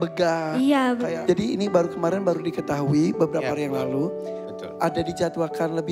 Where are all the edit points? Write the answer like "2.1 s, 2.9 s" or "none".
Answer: 1.1 s